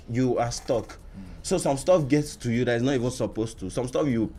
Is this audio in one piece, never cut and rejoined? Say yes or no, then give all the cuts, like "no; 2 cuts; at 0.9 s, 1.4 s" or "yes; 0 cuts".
yes; 0 cuts